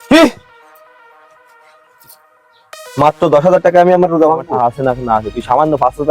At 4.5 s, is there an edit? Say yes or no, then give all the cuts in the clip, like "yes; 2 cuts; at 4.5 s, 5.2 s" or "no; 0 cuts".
yes; 1 cut; at 4.5 s